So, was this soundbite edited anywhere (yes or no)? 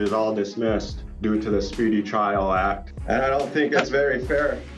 yes